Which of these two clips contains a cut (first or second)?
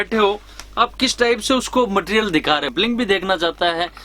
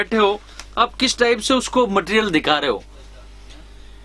first